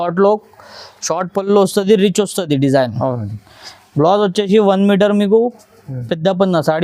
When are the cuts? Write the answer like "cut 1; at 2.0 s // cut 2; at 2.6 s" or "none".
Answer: none